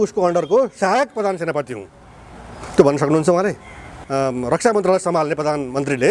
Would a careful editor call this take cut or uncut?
cut